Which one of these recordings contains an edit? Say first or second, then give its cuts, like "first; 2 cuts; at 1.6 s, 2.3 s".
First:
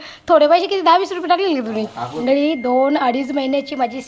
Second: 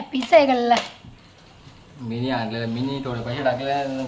first; 1 cut; at 2.2 s